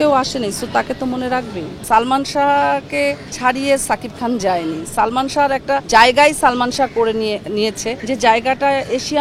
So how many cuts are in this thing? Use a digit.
4